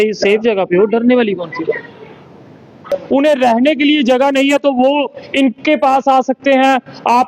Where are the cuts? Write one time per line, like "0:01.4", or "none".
0:02.8